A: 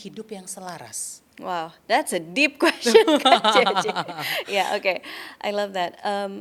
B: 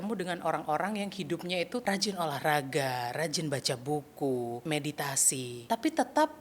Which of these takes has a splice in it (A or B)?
B